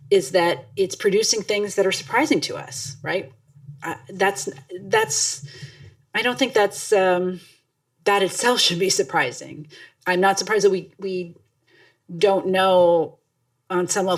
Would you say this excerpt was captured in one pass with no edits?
yes; 0 cuts

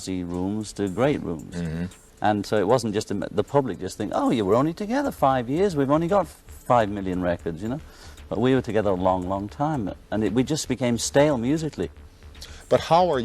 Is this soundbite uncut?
yes; 0 cuts

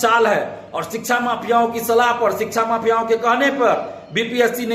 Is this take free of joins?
yes; 0 cuts

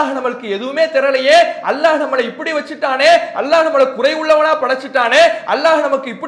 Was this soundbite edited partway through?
no; 0 cuts

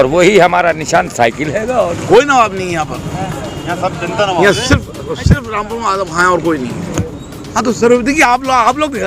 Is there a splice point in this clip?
yes; 2 cuts; at 2.0 s, 6.9 s

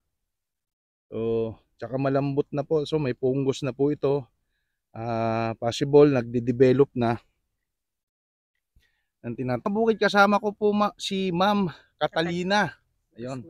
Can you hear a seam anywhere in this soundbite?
yes; 1 cut; at 9.6 s

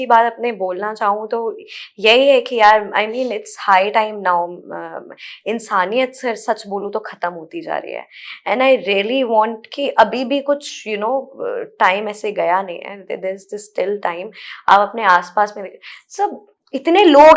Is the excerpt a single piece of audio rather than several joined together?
yes; 0 cuts

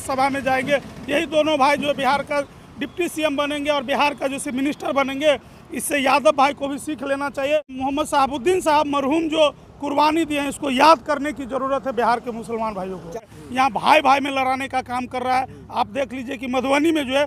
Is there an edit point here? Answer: yes; 2 cuts; at 7.7 s, 13.1 s

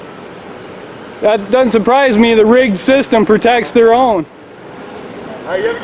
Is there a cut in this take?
no; 0 cuts

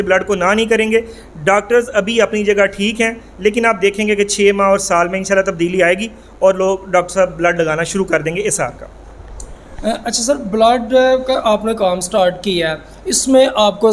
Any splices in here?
no; 0 cuts

